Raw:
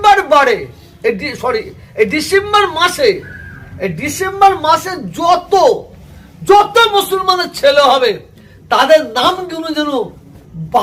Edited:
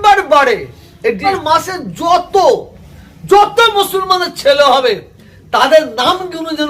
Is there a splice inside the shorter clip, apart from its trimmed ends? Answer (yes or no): yes